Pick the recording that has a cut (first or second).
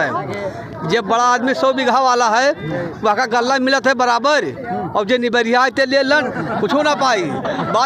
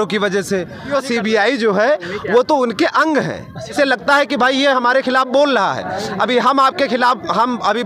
second